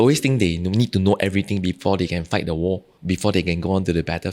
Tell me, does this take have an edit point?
yes; 1 cut; at 2.9 s

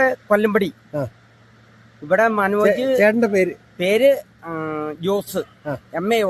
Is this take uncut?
yes; 0 cuts

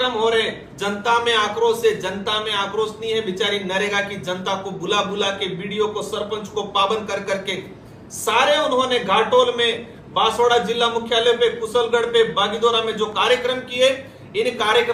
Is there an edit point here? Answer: no; 0 cuts

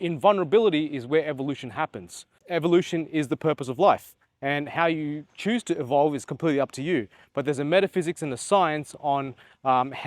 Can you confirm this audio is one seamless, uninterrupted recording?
no; 1 cut; at 2.4 s

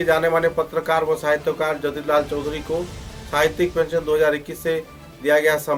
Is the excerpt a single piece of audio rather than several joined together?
yes; 0 cuts

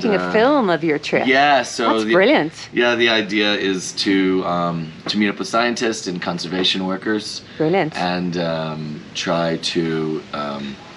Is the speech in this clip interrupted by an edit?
no; 0 cuts

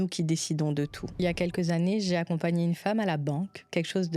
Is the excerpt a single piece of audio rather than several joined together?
no; 1 cut; at 1.2 s

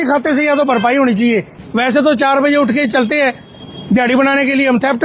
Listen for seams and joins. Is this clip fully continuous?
no; 1 cut; at 1.5 s

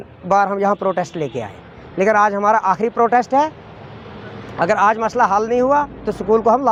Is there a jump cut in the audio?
no; 0 cuts

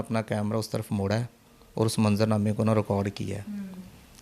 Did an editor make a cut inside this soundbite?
no; 0 cuts

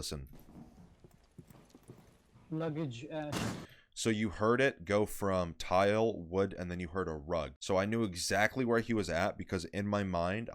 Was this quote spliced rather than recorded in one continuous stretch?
yes; 1 cut; at 7.5 s

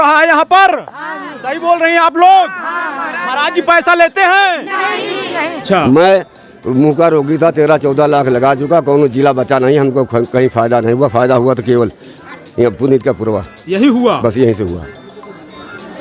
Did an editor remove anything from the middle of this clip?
yes; 1 cut; at 5.5 s

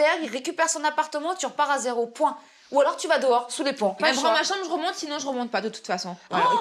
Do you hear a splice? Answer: no; 0 cuts

